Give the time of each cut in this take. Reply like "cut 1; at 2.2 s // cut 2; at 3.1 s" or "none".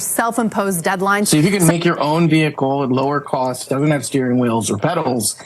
cut 1; at 1.3 s

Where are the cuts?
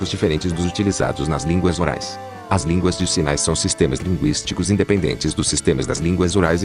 none

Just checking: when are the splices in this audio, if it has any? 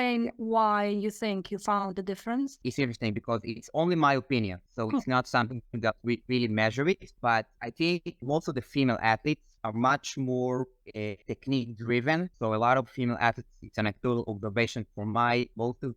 cut 1; at 2.6 s

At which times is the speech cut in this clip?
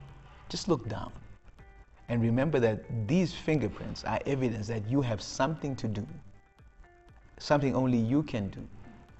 none

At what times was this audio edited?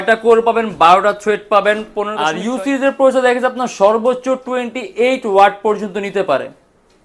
cut 1; at 2.2 s

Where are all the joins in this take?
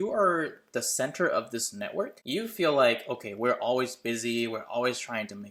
none

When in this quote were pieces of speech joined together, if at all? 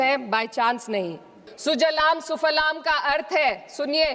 cut 1; at 1.5 s

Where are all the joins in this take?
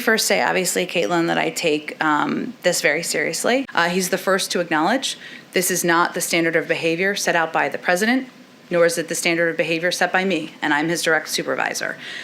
cut 1; at 3.7 s

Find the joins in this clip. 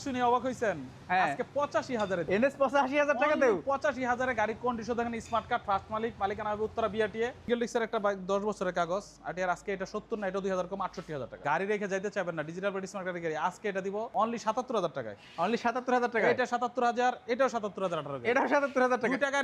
cut 1; at 2.2 s // cut 2; at 7.5 s // cut 3; at 11.4 s // cut 4; at 14.1 s

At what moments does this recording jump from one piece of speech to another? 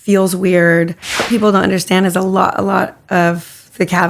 cut 1; at 1.3 s

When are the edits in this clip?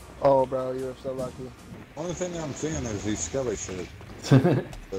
cut 1; at 1.6 s

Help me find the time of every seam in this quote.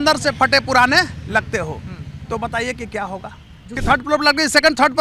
cut 1; at 3.7 s

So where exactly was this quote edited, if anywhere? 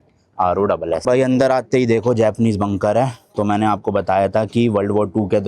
cut 1; at 1.0 s

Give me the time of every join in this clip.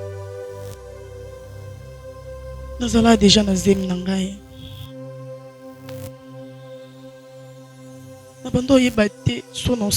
cut 1; at 2.8 s // cut 2; at 4.6 s // cut 3; at 8.2 s

